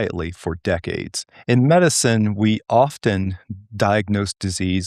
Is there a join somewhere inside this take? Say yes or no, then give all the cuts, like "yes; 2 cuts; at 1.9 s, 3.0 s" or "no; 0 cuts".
no; 0 cuts